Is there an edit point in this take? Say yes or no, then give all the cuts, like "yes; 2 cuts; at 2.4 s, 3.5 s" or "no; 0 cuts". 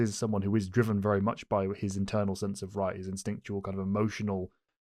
no; 0 cuts